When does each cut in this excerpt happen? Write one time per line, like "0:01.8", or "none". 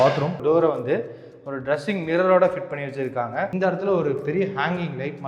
0:03.5